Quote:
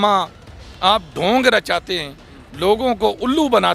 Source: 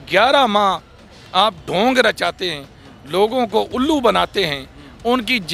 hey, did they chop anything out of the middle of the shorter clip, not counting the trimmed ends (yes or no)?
no